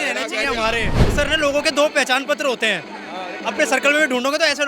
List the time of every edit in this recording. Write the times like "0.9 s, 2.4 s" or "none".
1.1 s